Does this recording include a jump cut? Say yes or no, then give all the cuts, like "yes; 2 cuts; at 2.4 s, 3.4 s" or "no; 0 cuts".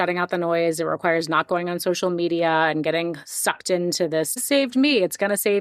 yes; 1 cut; at 4.4 s